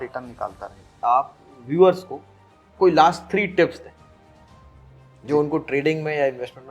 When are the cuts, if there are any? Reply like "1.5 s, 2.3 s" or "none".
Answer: 0.9 s